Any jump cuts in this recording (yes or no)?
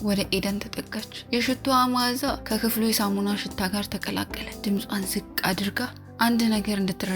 yes